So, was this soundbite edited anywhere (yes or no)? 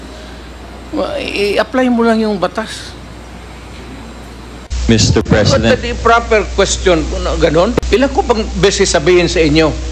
yes